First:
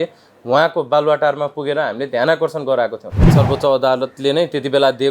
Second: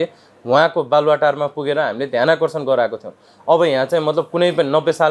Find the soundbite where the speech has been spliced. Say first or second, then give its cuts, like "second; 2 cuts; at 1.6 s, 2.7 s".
first; 1 cut; at 3.3 s